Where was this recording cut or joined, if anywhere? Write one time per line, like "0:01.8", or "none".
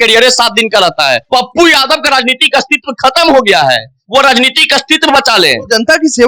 0:01.2